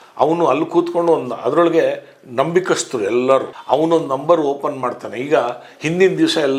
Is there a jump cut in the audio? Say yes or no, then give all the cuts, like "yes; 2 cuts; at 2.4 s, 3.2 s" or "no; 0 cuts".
no; 0 cuts